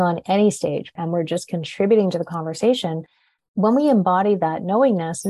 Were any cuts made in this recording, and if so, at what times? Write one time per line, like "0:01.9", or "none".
0:00.9